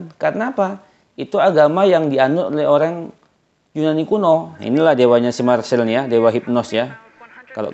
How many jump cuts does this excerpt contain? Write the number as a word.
one